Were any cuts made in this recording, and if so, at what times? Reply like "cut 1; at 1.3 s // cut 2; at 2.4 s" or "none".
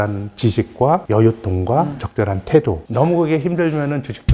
cut 1; at 2.8 s